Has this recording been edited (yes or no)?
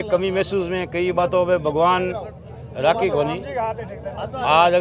no